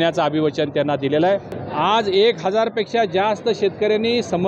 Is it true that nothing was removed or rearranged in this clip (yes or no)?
no